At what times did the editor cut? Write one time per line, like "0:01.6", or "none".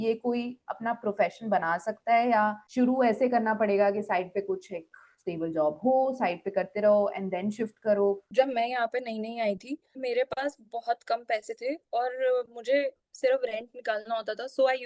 0:02.6
0:08.2
0:10.0

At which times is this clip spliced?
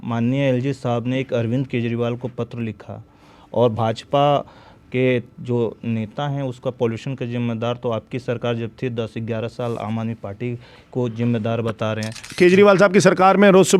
0:12.2

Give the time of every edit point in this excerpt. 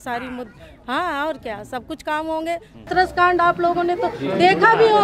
0:02.9

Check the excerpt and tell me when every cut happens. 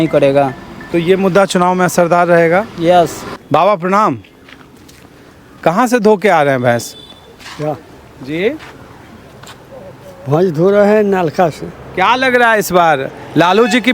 none

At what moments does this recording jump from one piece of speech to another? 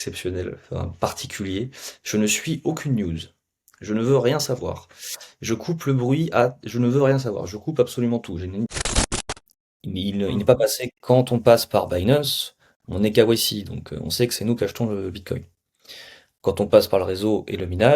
0:09.1

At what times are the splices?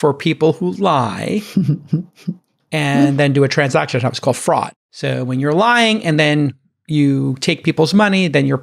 none

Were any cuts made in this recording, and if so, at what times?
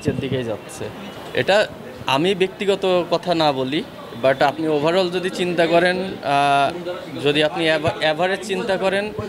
0:01.1

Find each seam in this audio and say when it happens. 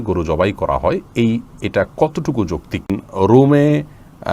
0:03.0

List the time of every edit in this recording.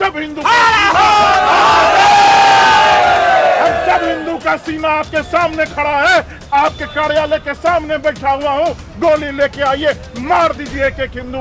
none

